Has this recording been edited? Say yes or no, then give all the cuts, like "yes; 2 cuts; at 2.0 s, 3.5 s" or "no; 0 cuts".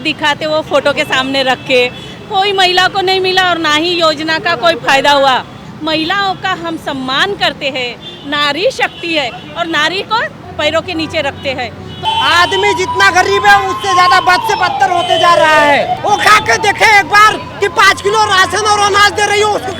yes; 3 cuts; at 5.6 s, 12.0 s, 15.9 s